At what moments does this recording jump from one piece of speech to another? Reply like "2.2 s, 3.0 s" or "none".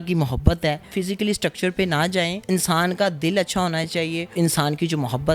0.9 s, 2.4 s, 4.3 s